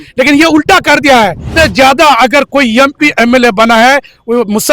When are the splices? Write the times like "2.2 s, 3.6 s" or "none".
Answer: 1.5 s